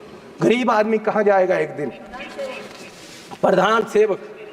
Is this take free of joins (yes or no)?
yes